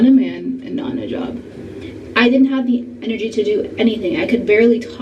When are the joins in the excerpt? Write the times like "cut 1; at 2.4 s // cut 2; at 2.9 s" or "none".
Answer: cut 1; at 1.8 s